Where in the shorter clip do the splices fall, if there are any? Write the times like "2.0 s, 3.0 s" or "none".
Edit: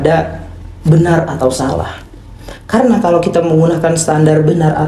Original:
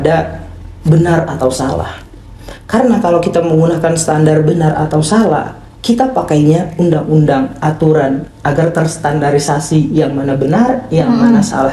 none